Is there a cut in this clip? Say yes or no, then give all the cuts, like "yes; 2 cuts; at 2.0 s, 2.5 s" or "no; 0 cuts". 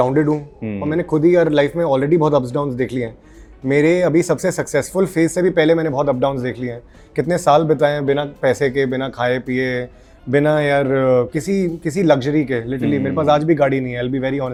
no; 0 cuts